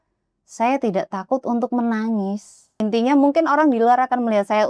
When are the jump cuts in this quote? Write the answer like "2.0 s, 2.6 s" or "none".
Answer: 2.8 s